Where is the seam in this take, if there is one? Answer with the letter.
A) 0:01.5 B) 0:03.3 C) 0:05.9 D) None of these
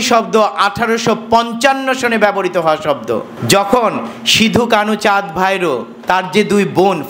B